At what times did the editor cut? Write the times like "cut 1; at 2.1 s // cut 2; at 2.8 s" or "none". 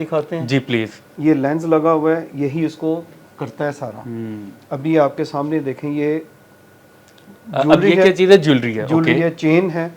cut 1; at 1.0 s